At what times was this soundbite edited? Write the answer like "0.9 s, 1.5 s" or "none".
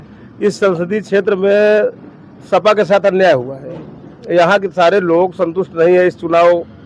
none